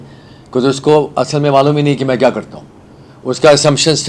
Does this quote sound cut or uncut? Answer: uncut